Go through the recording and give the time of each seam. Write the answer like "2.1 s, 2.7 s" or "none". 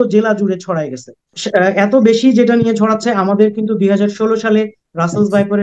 1.3 s